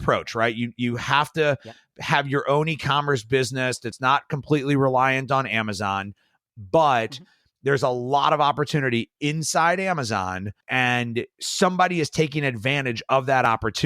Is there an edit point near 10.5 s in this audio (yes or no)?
yes